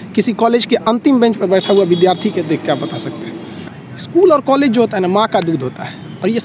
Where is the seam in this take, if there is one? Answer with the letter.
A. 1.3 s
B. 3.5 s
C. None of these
B